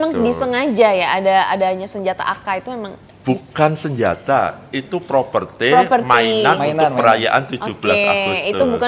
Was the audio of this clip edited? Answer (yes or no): no